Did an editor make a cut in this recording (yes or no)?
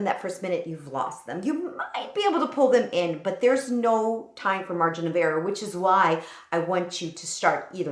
no